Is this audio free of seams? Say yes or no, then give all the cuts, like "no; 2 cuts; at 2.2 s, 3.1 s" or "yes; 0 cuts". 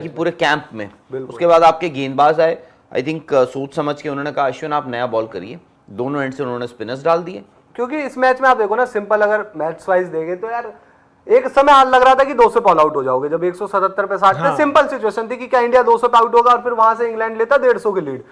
yes; 0 cuts